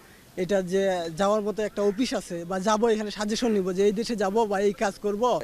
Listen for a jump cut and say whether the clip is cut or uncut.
uncut